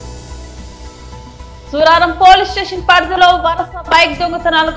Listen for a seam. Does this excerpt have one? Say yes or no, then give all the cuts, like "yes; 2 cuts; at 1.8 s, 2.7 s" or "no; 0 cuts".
yes; 1 cut; at 1.3 s